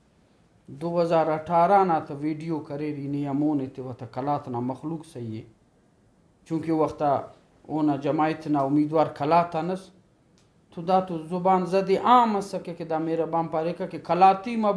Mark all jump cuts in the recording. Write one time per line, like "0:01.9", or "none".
none

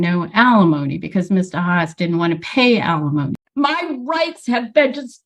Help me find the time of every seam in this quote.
0:03.4

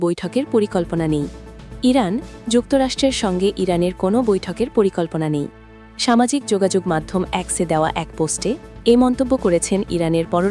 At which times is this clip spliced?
none

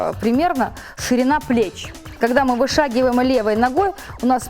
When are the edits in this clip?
0:02.2

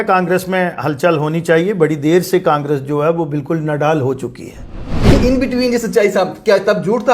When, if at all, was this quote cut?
0:05.0

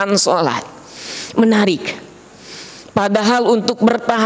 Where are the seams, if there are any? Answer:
none

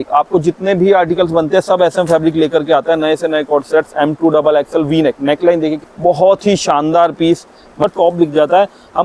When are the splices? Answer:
0:05.9
0:07.9

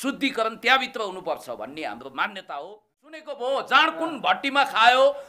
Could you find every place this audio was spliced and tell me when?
0:03.3

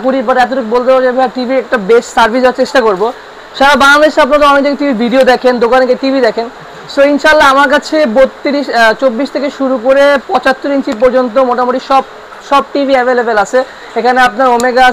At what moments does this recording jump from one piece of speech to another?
none

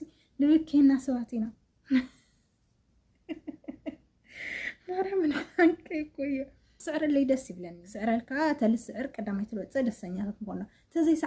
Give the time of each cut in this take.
0:06.8

